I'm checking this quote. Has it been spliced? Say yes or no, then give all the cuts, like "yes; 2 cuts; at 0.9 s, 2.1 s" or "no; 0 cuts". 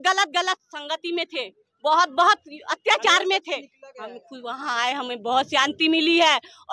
no; 0 cuts